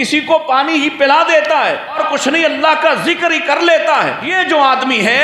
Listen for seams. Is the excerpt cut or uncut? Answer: cut